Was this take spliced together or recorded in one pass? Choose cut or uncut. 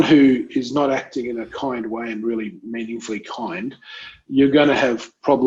uncut